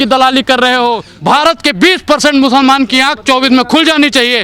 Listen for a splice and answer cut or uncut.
cut